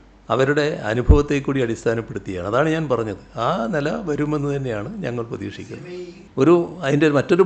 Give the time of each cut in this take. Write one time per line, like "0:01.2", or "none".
0:06.2